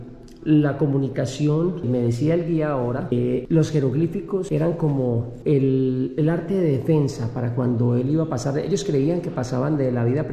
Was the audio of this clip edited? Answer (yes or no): no